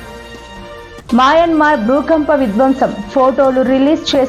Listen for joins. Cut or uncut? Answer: cut